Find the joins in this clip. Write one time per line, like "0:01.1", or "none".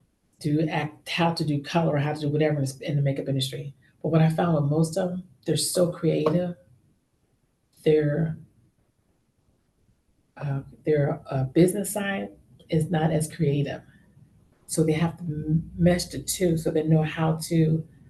none